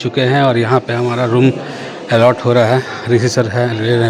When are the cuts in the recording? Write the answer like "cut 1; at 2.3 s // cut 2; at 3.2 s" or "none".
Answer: none